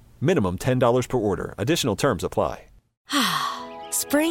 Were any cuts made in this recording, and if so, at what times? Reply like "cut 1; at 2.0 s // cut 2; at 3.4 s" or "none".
cut 1; at 2.9 s

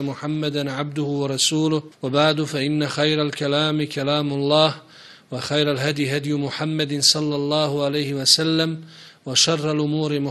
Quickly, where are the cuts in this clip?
cut 1; at 1.9 s

